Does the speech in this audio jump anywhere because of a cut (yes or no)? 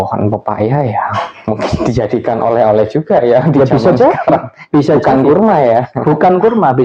no